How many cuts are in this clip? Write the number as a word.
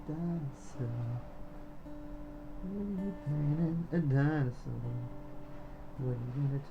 zero